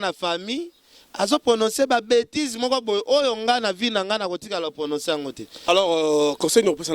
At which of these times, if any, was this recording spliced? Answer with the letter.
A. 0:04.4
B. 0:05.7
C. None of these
B